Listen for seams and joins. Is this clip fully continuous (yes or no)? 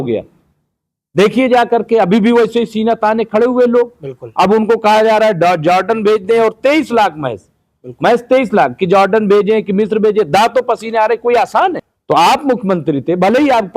no